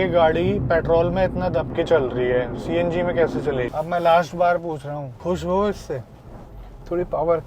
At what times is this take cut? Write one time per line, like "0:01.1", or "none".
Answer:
0:03.7
0:05.1

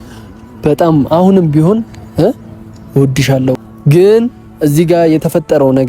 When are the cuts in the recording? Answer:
0:03.7

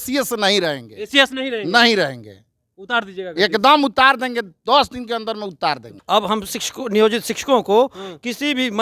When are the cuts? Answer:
0:05.9

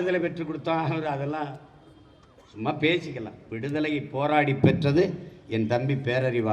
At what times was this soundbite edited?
none

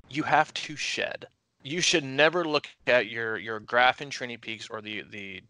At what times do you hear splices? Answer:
0:01.6

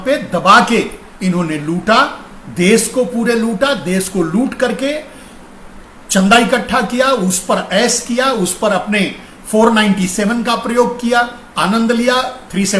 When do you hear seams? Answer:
none

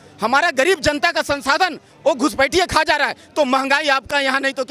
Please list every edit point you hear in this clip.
none

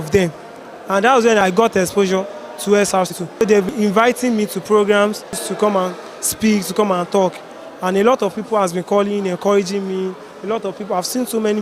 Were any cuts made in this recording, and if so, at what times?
0:01.4
0:03.7
0:05.4

